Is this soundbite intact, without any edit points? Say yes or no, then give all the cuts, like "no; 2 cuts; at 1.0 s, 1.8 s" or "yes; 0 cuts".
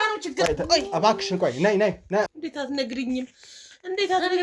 no; 1 cut; at 2.3 s